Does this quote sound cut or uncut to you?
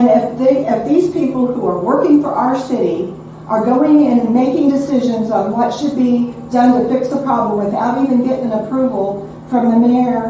uncut